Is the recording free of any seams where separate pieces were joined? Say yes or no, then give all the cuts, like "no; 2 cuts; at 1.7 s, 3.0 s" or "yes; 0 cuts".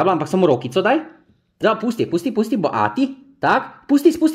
no; 1 cut; at 1.4 s